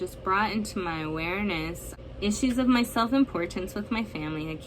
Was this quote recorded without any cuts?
no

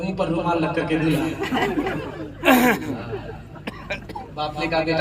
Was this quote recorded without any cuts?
yes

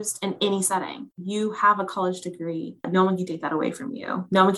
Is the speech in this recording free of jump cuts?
no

